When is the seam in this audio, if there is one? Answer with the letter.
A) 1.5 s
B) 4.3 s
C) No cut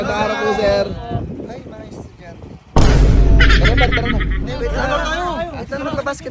C